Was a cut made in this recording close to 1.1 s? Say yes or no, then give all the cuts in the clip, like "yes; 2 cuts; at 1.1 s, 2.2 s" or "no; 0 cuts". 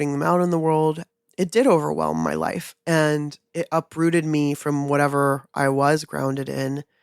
yes; 1 cut; at 1.1 s